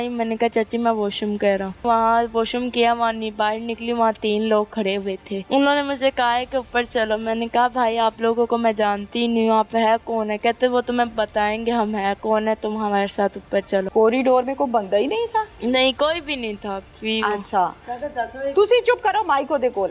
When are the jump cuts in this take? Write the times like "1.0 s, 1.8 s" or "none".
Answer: 1.8 s, 5.3 s, 13.9 s